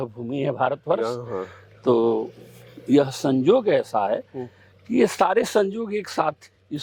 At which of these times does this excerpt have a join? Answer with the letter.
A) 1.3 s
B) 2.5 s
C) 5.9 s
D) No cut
D